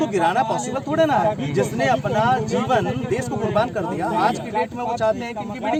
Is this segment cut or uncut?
uncut